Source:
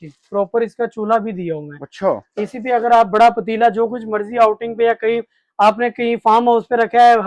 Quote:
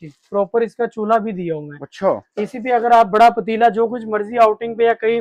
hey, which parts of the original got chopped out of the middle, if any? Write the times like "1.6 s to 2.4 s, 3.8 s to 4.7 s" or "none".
none

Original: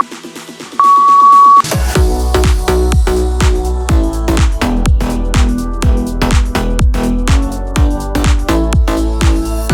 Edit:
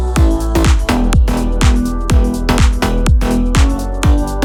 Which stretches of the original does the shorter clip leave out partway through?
none

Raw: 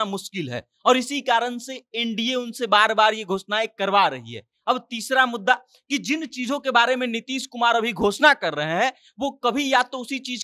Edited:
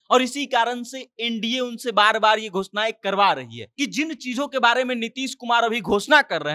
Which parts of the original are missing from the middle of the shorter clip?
4.4 s to 5.7 s

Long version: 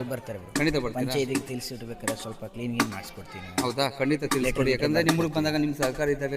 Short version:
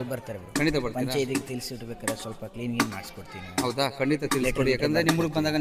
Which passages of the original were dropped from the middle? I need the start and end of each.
none

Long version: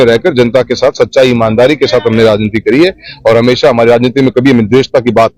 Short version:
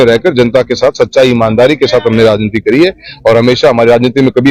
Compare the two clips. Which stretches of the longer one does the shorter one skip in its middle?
none

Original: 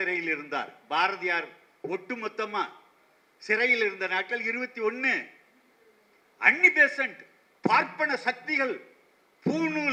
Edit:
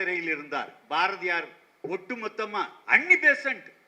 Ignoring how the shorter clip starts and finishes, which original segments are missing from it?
2.8 s to 6.3 s

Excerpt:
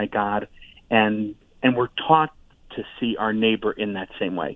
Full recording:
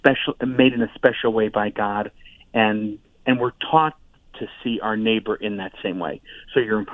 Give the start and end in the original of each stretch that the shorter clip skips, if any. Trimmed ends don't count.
none

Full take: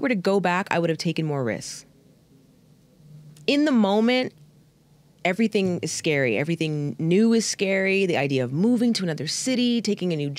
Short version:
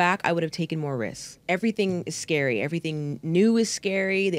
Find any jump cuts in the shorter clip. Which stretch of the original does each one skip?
1.7 s to 5.0 s

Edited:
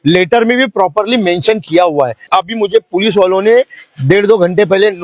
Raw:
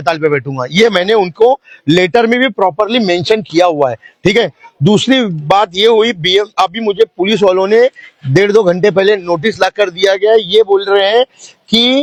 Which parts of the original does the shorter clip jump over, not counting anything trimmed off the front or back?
4.1 s to 6.5 s

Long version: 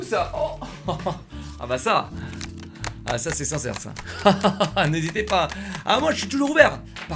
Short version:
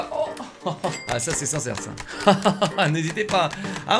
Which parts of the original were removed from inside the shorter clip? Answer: 1.2 s to 3.0 s

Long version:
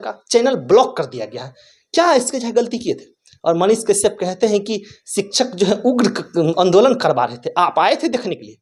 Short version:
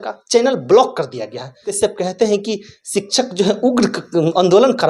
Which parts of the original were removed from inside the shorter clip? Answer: 1.7 s to 3.9 s

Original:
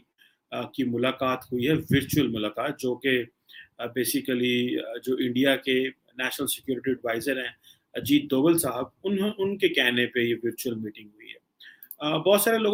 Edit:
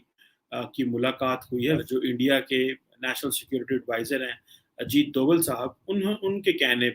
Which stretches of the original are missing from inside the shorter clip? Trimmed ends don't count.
1.8 s to 5.0 s

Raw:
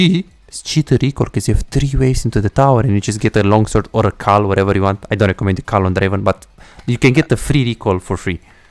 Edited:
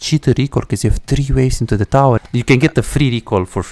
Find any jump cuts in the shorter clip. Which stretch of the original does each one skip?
2.8 s to 6.7 s

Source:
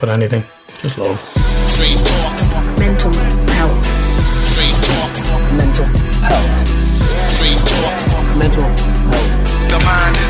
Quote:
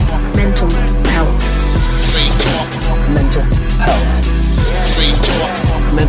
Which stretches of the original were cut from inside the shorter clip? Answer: none

